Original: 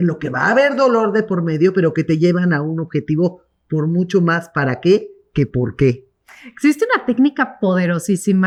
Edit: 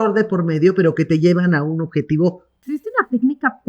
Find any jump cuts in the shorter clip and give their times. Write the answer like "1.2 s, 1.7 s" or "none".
2.7 s